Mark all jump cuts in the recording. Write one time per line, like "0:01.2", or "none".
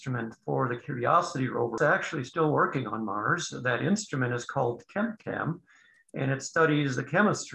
0:01.8

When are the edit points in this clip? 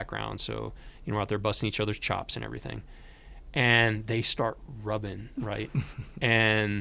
none

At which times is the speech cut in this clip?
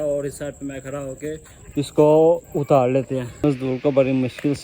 0:03.3

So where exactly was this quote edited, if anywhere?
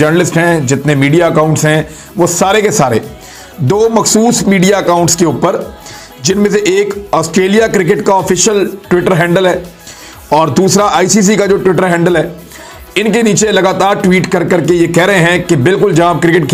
none

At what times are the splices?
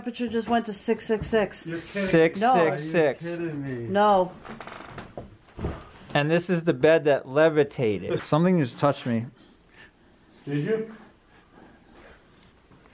0:08.1

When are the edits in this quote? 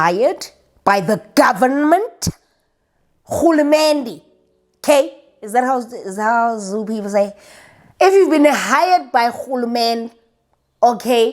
none

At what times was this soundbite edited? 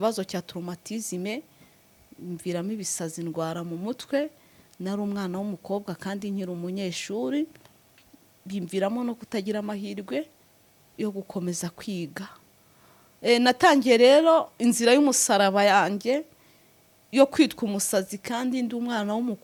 none

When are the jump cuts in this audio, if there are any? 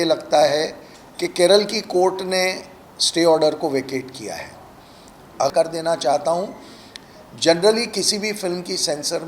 0:05.5

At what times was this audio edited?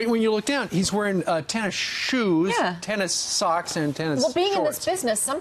0:01.6

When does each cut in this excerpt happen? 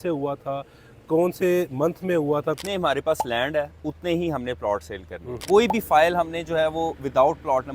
0:02.6
0:05.4

